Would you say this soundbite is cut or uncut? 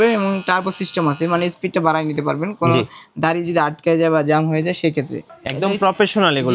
cut